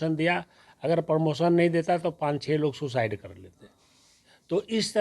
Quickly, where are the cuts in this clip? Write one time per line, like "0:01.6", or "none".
none